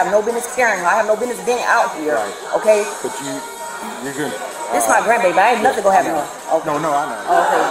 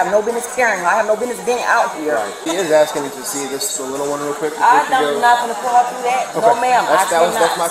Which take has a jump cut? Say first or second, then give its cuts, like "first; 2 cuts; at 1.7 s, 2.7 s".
second; 1 cut; at 2.4 s